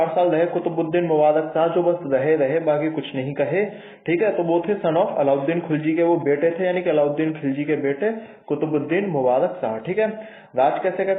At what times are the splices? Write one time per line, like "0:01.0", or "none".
none